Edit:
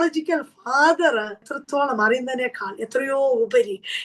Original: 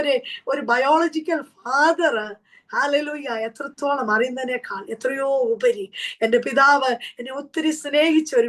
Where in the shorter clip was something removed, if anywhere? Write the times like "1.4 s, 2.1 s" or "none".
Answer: 1.5 s